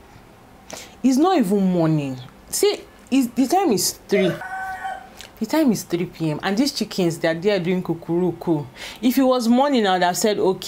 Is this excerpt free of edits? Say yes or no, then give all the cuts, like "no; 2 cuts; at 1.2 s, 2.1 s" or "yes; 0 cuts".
no; 1 cut; at 4.4 s